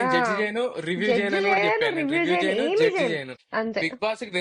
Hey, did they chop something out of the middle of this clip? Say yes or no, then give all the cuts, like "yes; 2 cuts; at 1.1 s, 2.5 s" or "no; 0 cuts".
yes; 1 cut; at 3.4 s